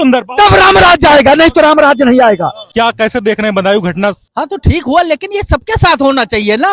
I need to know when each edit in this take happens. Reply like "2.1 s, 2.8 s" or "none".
2.6 s, 4.2 s